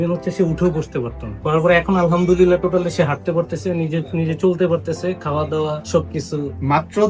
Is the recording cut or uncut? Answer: cut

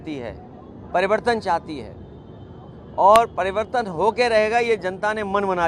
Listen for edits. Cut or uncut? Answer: uncut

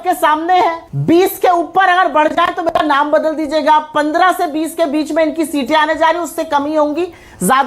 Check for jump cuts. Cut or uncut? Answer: cut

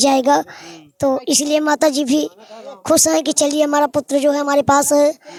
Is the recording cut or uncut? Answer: uncut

